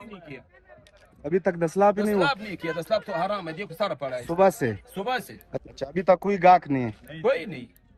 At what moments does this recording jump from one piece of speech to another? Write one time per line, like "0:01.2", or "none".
none